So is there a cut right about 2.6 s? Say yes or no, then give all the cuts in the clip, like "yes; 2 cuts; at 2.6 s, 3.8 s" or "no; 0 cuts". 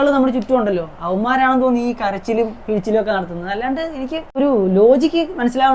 no; 1 cut; at 4.4 s